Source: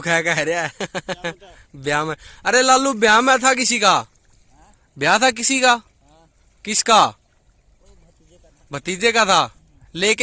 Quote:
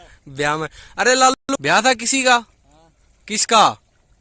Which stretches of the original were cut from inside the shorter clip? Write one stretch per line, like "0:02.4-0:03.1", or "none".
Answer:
0:02.8-0:04.7

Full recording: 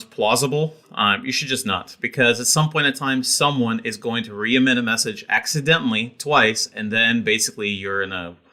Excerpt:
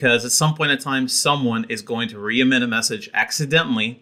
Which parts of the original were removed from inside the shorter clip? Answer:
none

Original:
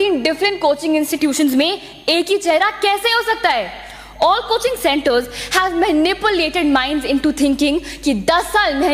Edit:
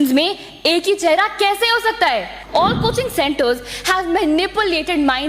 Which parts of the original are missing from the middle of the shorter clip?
0:03.8-0:04.0

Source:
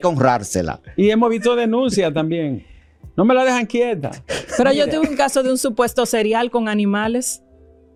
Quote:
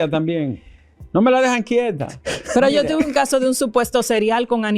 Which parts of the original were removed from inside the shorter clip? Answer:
none

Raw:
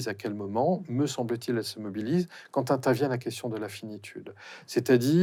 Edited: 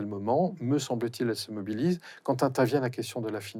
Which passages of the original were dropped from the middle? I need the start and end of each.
none

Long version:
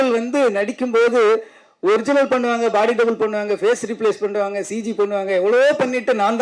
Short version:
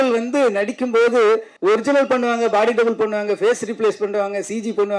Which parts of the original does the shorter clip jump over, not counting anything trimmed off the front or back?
0:01.5-0:01.7

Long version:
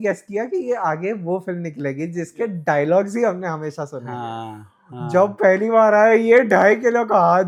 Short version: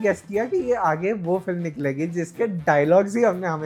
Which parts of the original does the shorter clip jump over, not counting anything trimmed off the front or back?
none

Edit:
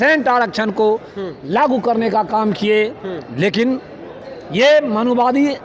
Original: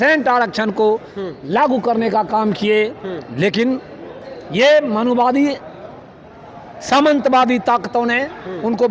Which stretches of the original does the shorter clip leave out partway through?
none

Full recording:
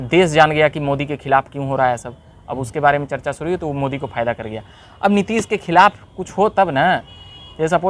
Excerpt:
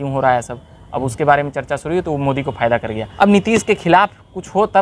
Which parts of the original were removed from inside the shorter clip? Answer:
0:04.6-0:04.9

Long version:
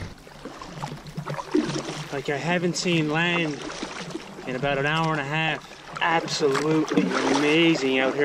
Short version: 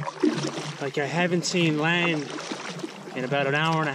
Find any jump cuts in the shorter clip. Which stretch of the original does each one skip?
none

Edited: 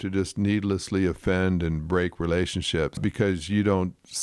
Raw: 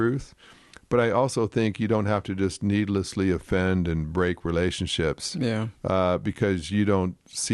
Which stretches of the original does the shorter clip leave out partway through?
0:05.2-0:06.2

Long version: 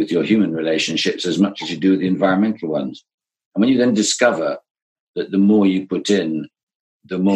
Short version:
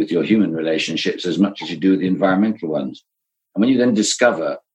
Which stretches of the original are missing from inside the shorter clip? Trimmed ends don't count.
none

